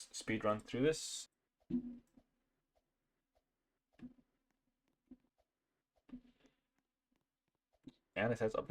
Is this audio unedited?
no; 2 cuts; at 1.1 s, 5.3 s

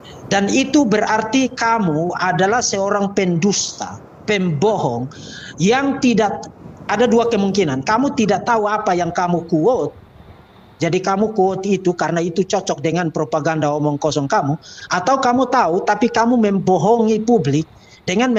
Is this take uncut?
yes; 0 cuts

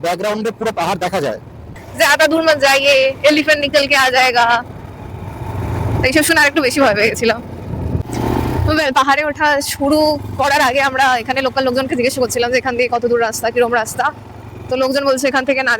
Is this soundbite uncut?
no; 2 cuts; at 1.8 s, 8.1 s

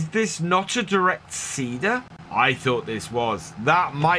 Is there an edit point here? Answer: yes; 1 cut; at 2.2 s

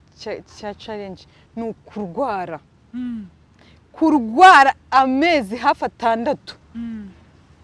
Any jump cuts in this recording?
no; 0 cuts

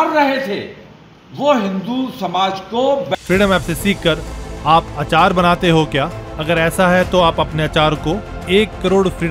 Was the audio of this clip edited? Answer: yes; 1 cut; at 3.1 s

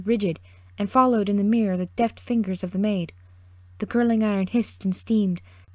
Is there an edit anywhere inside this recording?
no; 0 cuts

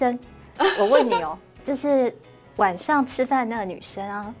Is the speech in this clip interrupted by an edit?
yes; 1 cut; at 1.4 s

